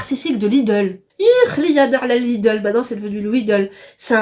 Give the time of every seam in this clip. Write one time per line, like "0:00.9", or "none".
0:01.0